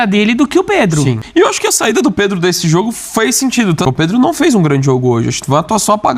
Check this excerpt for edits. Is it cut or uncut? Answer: cut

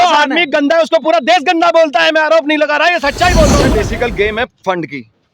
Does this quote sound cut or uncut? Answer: cut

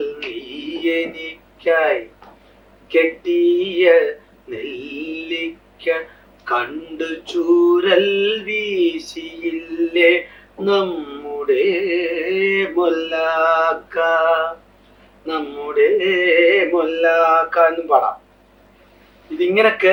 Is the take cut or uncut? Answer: uncut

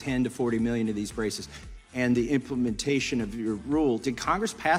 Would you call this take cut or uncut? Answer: uncut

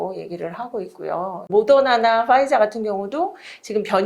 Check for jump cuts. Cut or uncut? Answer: cut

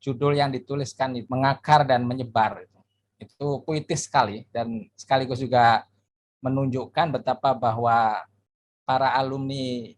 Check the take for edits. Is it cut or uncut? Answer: cut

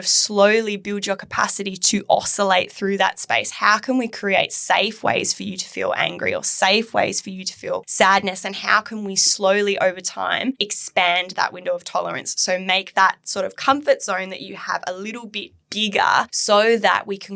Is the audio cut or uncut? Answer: cut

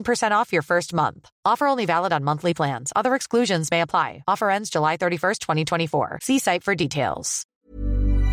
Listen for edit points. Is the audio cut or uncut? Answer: cut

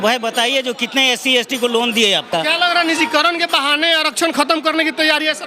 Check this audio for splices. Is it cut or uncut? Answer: cut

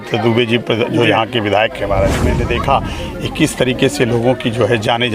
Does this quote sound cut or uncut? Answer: cut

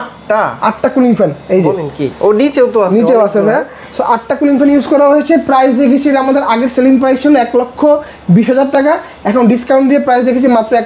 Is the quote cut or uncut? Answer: uncut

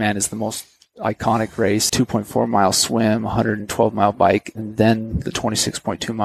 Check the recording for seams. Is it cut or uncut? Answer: cut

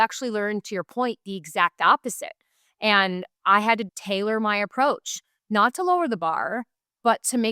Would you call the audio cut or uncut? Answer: cut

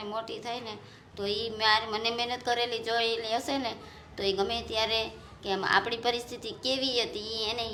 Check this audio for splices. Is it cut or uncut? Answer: uncut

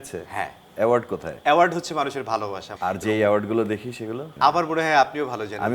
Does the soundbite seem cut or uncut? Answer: cut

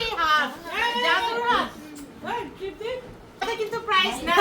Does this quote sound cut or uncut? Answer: cut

